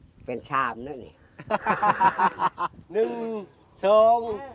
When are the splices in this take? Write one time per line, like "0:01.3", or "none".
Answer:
0:02.8